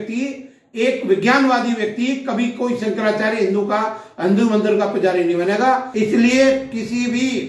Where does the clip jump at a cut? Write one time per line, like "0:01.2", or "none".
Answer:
0:05.9